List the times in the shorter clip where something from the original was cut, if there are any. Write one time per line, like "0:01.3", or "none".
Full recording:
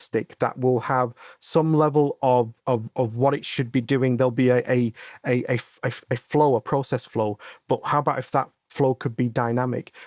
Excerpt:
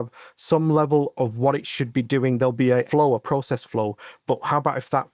0:01.1
0:02.9